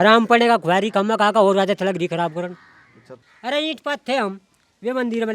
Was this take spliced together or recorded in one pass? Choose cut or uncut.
cut